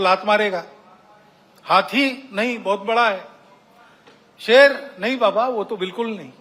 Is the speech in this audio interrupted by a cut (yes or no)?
no